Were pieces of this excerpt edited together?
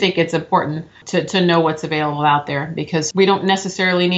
yes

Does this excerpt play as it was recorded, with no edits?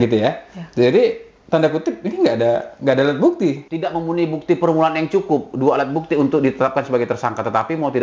no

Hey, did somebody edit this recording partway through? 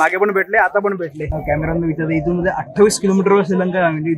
yes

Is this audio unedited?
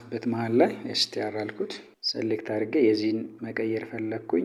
yes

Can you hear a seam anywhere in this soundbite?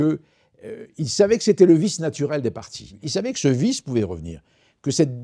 yes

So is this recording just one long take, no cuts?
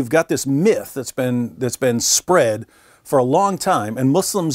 yes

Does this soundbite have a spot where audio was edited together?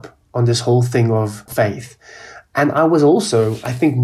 yes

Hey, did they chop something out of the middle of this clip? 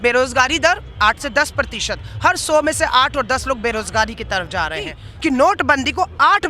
yes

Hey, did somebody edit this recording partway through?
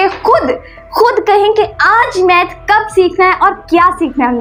no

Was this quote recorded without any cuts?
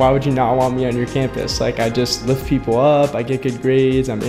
yes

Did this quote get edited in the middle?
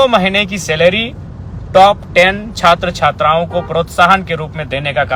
no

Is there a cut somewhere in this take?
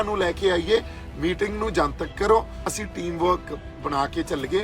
yes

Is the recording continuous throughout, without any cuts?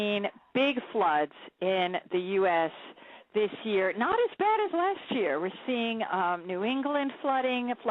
no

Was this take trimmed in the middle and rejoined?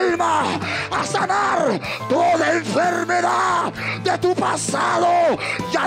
no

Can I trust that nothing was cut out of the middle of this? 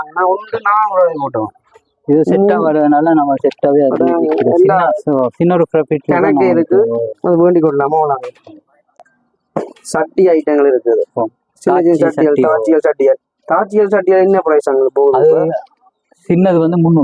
no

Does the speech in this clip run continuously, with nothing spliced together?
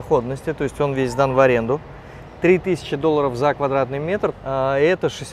no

